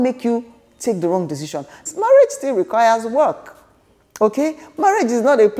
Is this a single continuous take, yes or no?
no